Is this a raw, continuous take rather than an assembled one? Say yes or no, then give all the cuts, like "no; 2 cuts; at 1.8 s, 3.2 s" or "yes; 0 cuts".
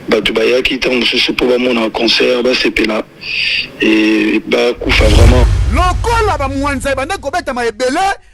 no; 1 cut; at 5.5 s